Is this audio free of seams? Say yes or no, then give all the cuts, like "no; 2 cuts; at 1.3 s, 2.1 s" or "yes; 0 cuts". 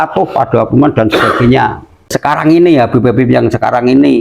no; 1 cut; at 2.2 s